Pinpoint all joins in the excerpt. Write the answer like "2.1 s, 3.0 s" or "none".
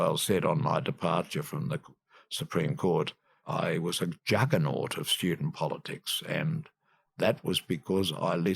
3.4 s